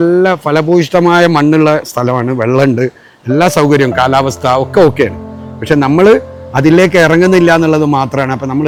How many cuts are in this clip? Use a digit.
0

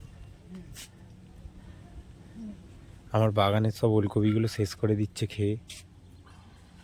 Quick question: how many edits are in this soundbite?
0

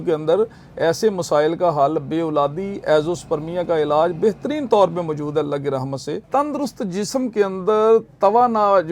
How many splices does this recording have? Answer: 1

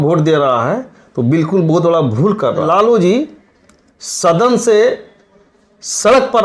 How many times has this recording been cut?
1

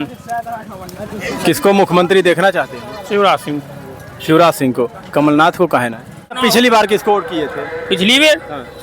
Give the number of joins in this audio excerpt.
1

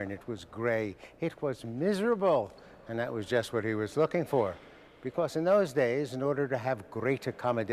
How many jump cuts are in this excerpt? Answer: 1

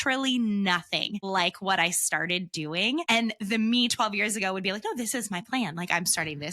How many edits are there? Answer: 2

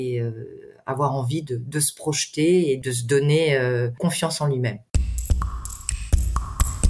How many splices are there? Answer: 3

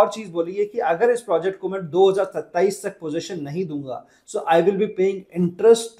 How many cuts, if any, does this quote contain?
0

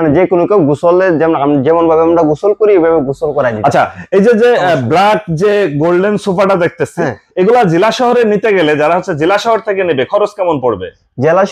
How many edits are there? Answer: 0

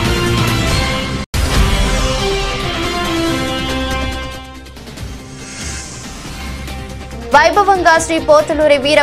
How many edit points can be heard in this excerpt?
2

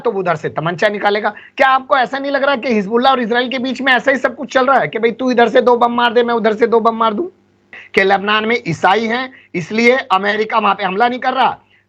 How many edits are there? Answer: 1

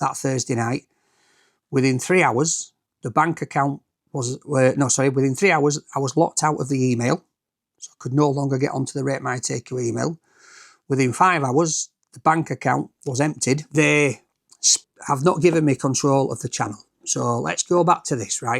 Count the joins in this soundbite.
1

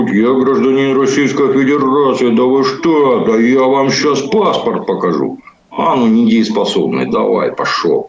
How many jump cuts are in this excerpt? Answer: 0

